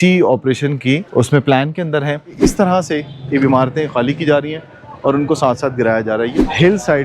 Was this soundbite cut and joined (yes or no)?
yes